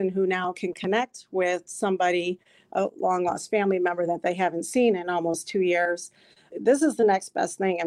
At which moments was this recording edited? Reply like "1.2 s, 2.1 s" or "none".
6.5 s